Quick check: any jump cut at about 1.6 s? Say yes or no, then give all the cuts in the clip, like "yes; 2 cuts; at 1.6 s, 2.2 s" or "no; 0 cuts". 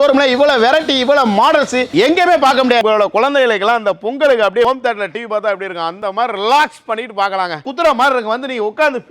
no; 3 cuts; at 2.8 s, 4.6 s, 7.6 s